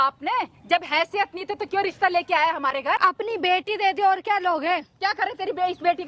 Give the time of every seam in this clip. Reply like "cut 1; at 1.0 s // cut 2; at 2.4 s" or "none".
cut 1; at 3.0 s